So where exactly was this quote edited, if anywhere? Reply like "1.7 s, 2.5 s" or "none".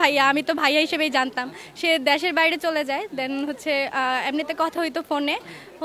none

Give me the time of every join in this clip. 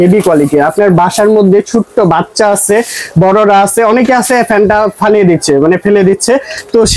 none

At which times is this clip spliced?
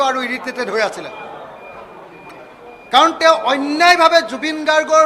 none

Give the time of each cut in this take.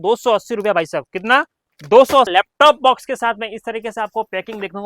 2.3 s

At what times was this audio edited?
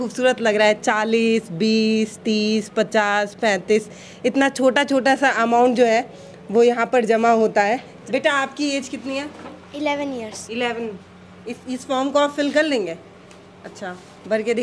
7.9 s

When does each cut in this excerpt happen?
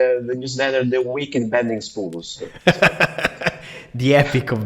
none

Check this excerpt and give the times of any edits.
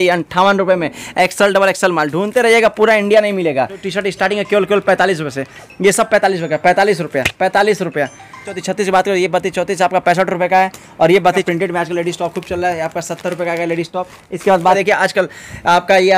3.8 s, 8.5 s, 11.4 s, 14.8 s

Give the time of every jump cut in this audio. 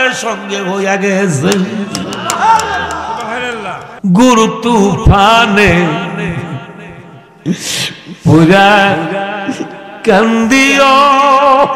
3.9 s

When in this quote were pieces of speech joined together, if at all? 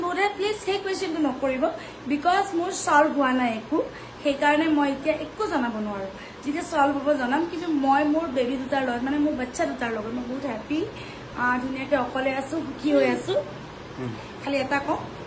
none

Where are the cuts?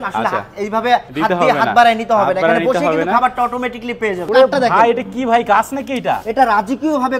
1.1 s, 4.2 s

